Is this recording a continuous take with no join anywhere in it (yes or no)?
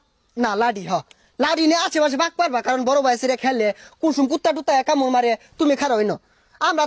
yes